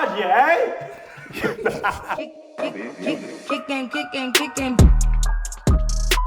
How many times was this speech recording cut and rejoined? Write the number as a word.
one